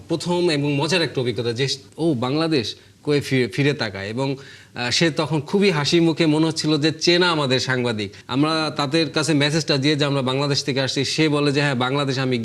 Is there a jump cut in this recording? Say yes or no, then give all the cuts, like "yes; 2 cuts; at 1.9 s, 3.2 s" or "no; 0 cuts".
yes; 2 cuts; at 1.8 s, 8.2 s